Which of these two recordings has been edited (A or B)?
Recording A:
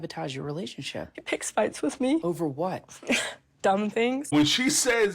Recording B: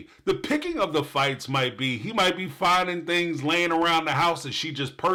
A